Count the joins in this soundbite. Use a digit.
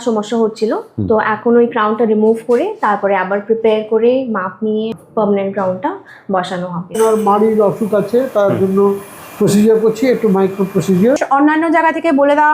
3